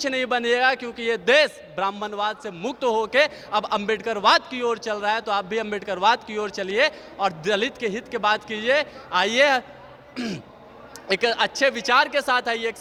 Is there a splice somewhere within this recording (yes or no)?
no